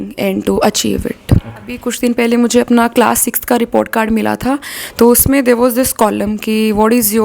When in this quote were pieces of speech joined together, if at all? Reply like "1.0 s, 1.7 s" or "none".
1.8 s